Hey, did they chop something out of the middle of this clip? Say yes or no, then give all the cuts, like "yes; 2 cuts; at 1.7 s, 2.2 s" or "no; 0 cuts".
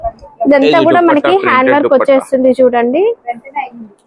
no; 0 cuts